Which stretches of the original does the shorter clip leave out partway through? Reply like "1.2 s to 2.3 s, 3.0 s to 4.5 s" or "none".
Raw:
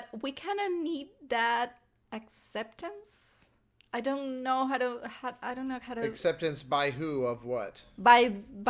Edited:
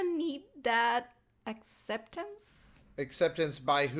3.7 s to 6.1 s